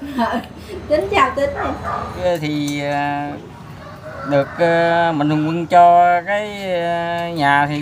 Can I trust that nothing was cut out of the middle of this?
no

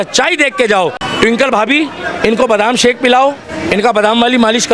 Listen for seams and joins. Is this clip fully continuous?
no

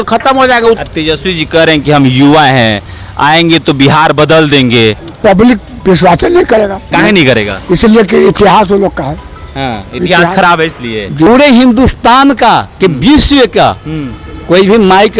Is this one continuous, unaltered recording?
no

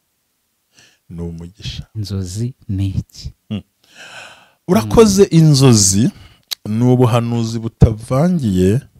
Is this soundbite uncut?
no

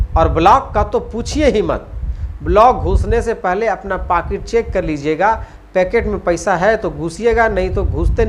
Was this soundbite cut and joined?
no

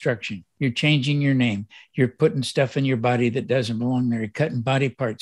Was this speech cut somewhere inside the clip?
no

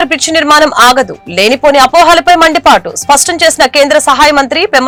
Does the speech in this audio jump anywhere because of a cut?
no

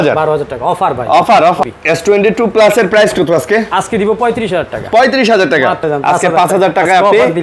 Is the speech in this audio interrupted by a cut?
yes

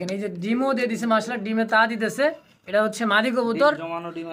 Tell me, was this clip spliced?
no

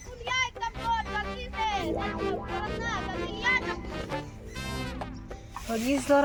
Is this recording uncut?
yes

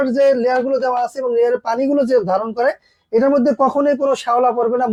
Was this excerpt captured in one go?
yes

